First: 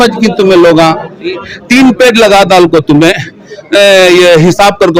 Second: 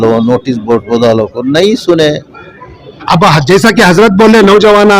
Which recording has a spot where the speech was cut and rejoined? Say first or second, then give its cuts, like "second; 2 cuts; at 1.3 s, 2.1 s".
second; 1 cut; at 3.0 s